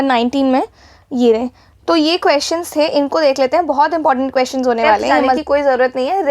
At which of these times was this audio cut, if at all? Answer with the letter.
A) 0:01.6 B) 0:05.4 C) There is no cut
B